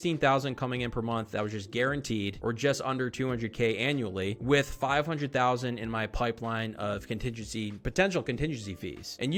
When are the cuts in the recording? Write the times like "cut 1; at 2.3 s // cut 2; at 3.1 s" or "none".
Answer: none